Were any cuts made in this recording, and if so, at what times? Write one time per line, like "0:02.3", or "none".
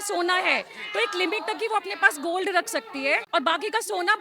0:03.2